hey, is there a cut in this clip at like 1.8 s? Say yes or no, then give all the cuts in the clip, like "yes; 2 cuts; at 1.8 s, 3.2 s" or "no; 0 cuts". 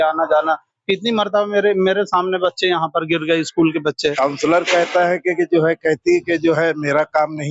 no; 1 cut; at 4.1 s